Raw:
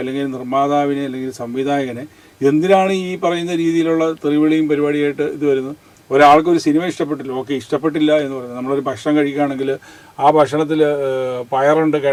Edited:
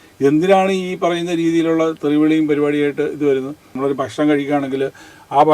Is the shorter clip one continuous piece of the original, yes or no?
no